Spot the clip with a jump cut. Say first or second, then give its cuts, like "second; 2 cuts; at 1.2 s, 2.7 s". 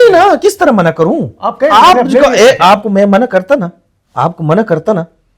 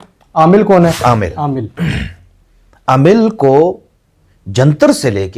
second; 1 cut; at 1.0 s